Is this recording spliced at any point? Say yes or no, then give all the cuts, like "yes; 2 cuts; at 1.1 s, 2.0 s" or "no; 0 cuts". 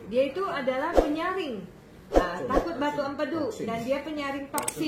no; 0 cuts